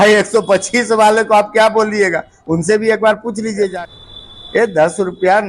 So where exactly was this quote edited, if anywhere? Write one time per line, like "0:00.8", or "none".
0:03.7

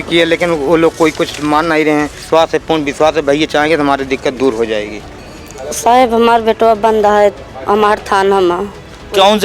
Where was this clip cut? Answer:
0:02.2
0:05.1

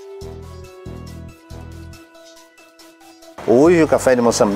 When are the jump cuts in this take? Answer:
0:03.4

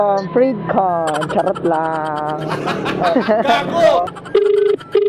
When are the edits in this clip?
0:04.1

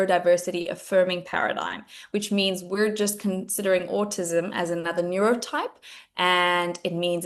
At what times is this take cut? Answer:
none

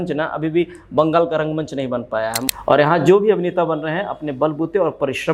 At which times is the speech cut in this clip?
0:02.4

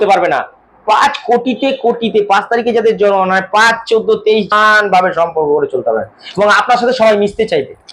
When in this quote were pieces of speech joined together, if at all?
0:04.5

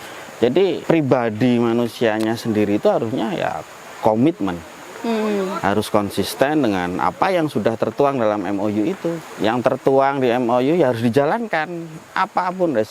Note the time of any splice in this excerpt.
0:00.8
0:09.2

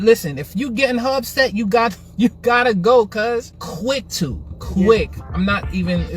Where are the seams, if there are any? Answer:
0:03.6

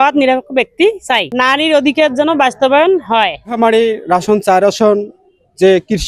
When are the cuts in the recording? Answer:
0:01.3

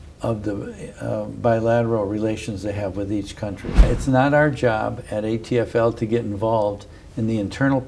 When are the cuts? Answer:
0:03.8

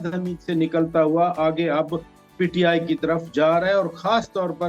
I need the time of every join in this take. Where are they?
none

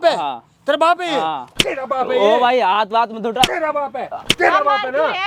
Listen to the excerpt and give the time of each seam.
none

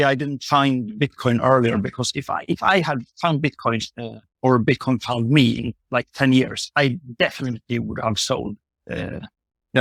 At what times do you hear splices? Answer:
none

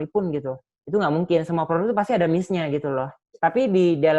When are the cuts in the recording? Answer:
0:03.2

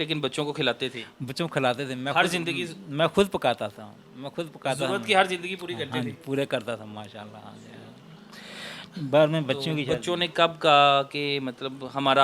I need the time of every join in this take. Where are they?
none

